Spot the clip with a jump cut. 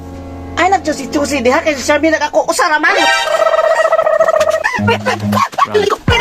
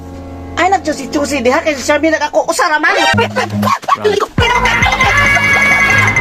second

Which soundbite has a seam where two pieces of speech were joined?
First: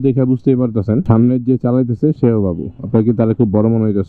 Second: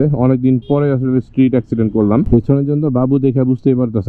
second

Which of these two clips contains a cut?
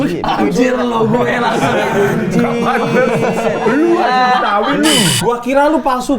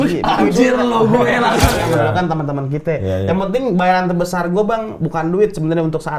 second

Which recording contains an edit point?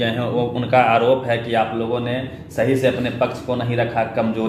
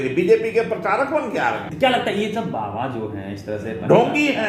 second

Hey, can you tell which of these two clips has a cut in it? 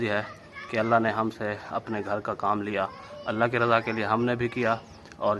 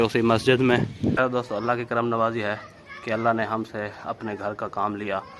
second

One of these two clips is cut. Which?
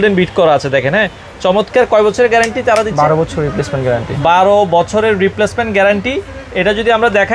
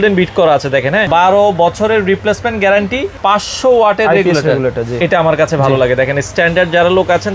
second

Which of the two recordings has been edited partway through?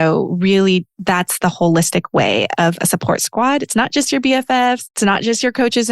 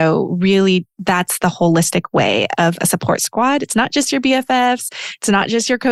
first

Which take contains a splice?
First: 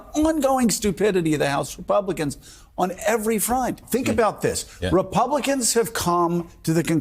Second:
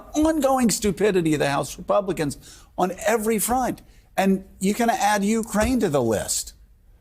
first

